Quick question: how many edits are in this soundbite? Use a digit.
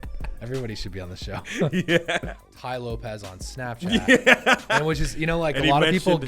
1